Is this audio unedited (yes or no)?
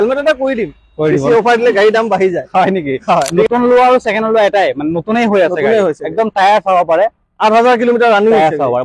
no